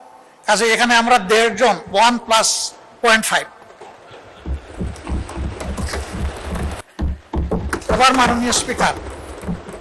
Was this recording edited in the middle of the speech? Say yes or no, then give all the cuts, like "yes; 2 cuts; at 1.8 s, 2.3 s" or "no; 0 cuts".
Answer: yes; 1 cut; at 6.8 s